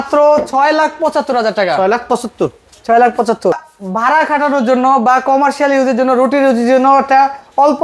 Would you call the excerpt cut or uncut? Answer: uncut